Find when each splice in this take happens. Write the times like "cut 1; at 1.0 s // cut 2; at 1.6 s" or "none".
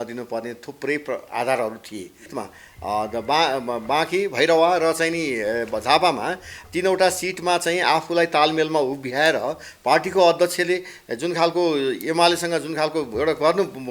cut 1; at 2.3 s